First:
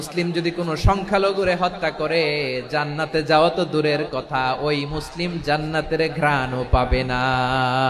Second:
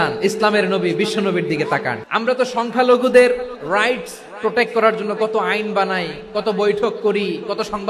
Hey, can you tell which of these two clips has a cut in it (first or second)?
second